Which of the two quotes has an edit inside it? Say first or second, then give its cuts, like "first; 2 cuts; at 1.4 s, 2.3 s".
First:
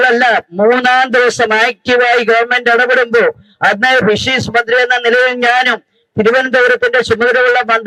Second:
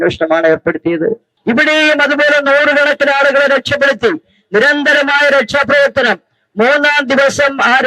second; 1 cut; at 1.3 s